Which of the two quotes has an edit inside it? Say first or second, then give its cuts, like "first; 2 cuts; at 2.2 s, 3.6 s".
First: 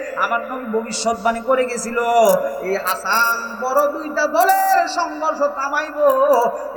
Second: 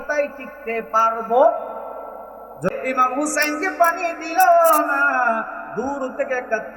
second; 1 cut; at 2.7 s